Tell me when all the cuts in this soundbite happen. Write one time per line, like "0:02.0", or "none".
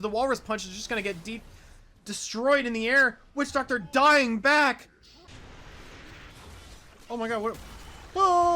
0:05.5